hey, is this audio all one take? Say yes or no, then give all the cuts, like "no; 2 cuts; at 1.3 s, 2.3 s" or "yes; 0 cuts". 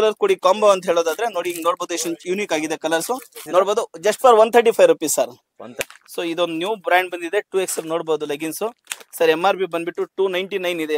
no; 2 cuts; at 3.4 s, 5.9 s